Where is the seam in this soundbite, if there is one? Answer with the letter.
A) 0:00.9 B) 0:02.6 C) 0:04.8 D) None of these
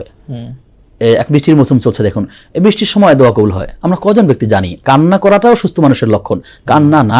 C